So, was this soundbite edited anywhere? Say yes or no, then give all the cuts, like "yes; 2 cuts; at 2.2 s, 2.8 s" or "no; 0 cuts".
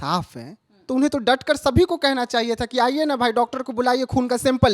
no; 0 cuts